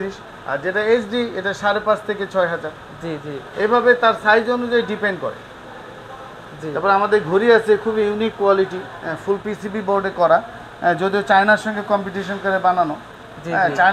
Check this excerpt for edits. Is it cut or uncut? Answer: uncut